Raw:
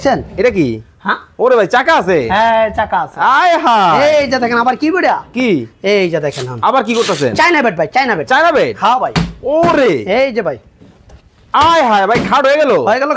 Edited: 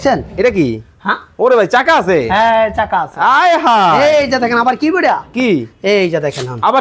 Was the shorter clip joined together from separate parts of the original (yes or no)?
no